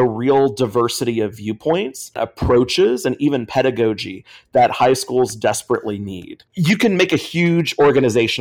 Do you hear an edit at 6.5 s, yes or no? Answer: yes